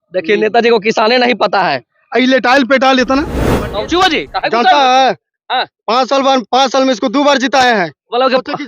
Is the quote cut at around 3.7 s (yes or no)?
yes